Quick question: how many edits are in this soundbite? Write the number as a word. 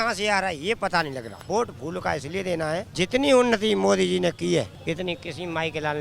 three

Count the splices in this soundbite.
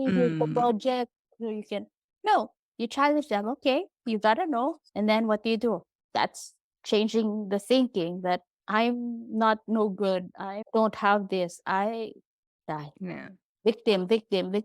two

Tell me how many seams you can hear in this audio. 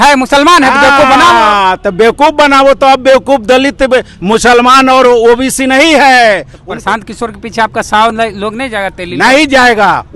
one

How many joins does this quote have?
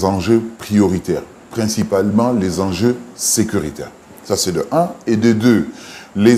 zero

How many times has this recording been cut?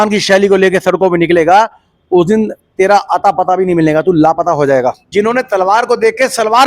one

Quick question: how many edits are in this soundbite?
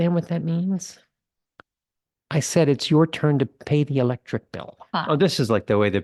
one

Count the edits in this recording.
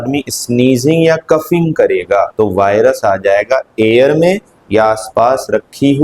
one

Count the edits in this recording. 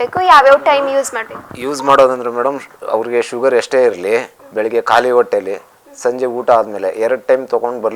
one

